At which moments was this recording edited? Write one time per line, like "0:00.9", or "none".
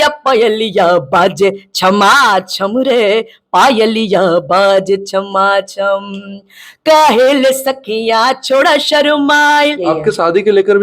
0:09.8